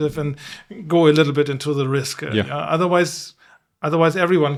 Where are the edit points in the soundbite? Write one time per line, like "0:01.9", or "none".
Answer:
none